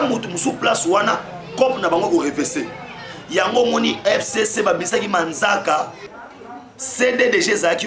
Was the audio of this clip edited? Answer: yes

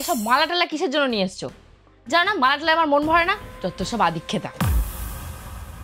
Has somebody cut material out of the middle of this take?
yes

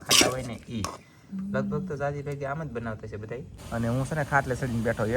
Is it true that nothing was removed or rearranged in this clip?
no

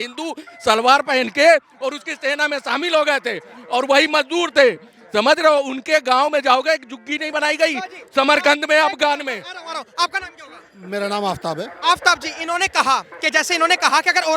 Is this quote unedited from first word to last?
yes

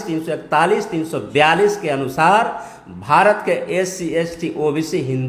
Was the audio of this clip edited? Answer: no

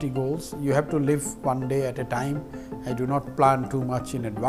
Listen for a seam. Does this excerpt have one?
no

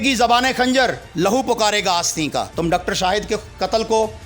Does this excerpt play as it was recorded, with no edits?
no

